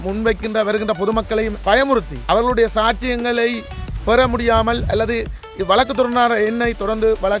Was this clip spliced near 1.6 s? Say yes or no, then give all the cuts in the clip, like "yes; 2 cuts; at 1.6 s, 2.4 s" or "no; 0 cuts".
yes; 2 cuts; at 1.6 s, 2.1 s